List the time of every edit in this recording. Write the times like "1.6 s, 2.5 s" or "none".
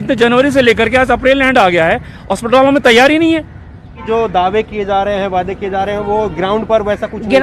3.9 s